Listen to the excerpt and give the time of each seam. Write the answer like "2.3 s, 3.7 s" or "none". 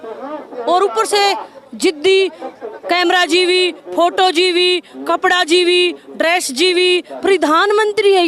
none